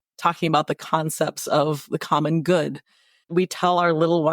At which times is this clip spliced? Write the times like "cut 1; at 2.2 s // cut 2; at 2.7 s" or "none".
cut 1; at 3.1 s